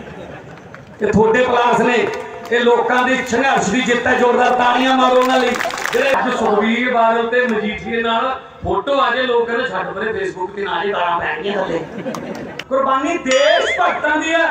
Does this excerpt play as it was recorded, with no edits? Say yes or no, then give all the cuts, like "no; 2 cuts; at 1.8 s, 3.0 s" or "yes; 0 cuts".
no; 2 cuts; at 6.1 s, 12.6 s